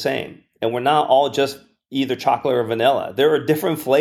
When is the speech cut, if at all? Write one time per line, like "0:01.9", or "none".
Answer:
none